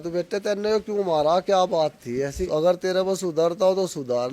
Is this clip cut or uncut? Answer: cut